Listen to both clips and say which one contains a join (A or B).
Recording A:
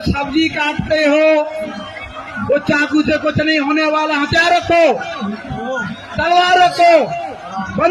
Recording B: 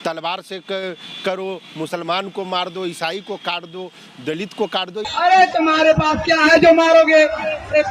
B